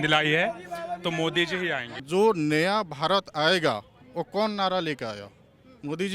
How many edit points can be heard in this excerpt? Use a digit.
1